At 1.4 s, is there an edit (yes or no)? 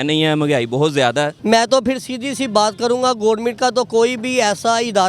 yes